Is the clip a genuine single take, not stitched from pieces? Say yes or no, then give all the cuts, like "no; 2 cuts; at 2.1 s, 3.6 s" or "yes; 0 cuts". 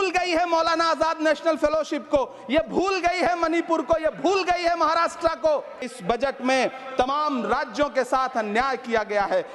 no; 1 cut; at 5.9 s